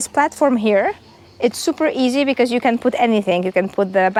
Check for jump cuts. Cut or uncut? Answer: uncut